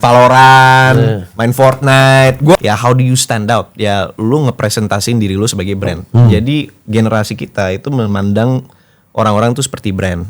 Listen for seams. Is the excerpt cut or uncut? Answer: cut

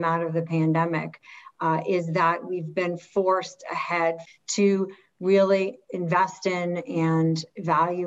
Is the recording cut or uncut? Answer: cut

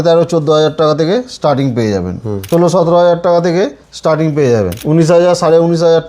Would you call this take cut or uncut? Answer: cut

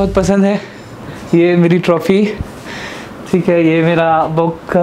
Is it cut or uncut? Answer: uncut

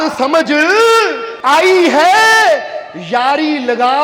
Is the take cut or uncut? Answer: cut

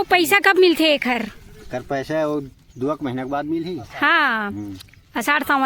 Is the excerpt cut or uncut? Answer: uncut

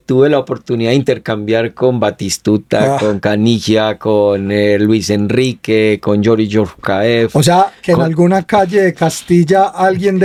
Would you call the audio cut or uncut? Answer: uncut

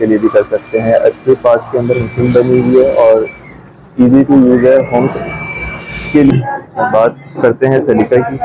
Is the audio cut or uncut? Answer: cut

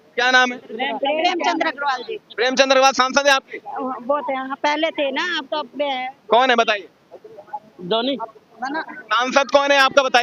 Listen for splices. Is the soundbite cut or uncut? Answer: uncut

